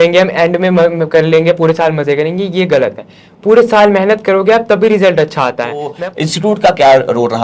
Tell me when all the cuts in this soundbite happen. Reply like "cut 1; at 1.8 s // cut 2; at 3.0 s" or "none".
cut 1; at 6.0 s